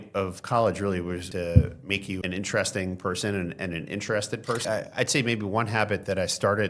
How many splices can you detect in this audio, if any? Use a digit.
3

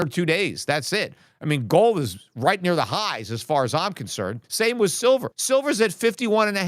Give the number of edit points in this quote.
2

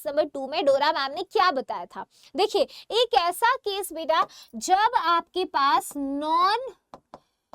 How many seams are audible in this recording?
0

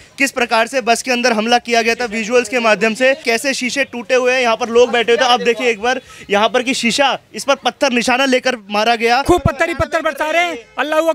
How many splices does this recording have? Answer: 2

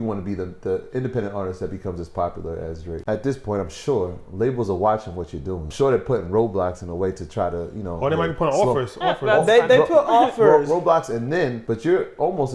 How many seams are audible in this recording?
3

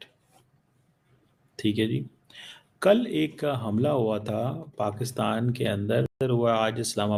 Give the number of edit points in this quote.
0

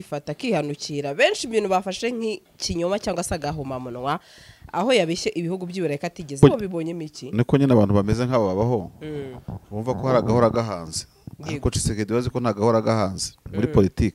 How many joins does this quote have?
1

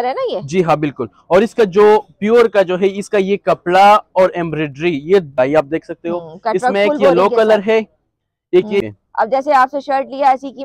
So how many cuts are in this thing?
2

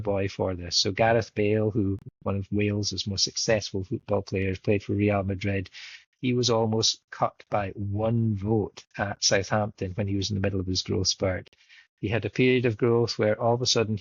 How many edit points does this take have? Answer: 0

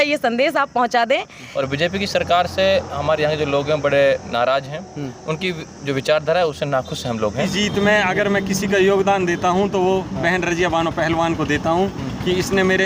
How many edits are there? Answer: 2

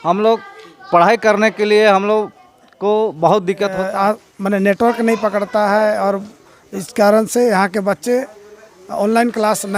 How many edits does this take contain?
1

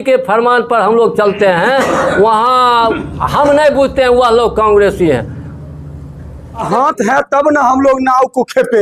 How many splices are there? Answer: 1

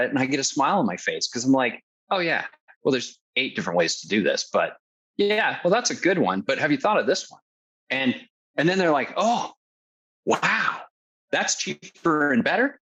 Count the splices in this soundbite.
0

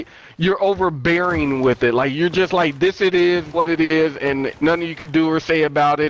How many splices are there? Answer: 1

